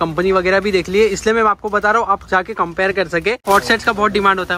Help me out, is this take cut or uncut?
cut